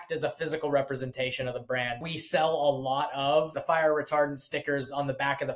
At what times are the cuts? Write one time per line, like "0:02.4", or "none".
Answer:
0:02.0
0:03.6